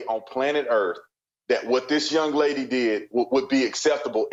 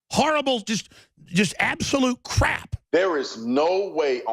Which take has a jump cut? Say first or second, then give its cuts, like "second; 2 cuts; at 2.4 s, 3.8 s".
second; 1 cut; at 2.7 s